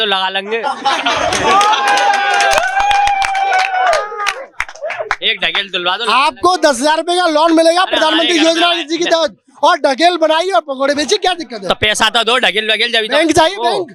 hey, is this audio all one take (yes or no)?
yes